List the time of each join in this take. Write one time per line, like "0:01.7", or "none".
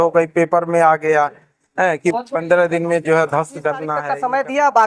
0:03.9